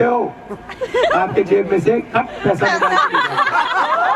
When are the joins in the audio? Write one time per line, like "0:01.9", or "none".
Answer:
none